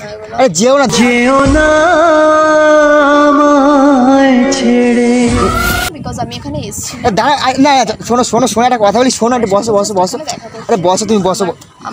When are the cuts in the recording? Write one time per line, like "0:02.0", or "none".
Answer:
none